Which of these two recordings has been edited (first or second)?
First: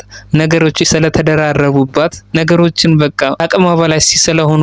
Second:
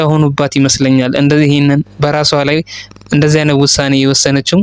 first